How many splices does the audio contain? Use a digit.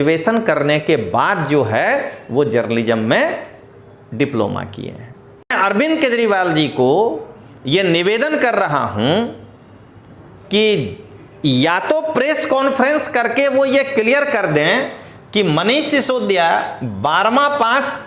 1